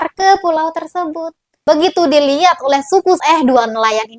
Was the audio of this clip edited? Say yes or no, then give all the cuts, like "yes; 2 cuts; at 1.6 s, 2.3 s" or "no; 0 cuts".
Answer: yes; 1 cut; at 3.2 s